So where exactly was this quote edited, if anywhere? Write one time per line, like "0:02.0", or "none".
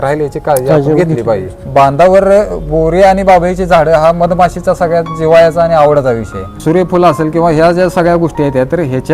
0:01.5
0:06.5